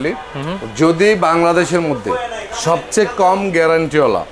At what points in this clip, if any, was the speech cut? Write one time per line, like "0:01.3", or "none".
none